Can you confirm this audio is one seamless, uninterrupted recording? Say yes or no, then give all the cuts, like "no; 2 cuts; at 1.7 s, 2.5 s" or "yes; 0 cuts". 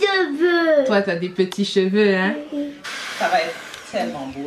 no; 1 cut; at 2.8 s